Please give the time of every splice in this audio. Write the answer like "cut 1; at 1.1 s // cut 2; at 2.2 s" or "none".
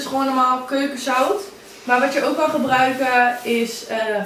cut 1; at 1.7 s